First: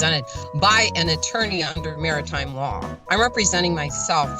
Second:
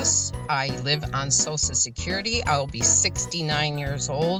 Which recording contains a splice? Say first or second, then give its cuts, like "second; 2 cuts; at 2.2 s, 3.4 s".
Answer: first; 1 cut; at 2.9 s